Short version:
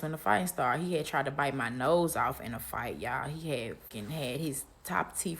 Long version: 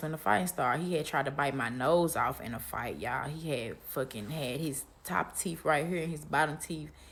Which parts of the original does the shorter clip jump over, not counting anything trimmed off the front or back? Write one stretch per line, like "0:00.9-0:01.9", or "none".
0:03.9-0:04.1